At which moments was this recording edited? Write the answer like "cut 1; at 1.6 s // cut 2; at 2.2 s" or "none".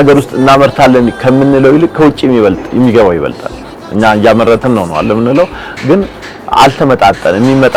none